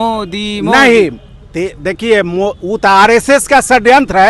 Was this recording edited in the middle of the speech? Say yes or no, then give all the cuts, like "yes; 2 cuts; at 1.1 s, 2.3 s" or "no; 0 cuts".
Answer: no; 0 cuts